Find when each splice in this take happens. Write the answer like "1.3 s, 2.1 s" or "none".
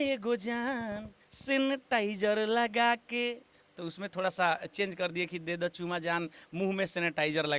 none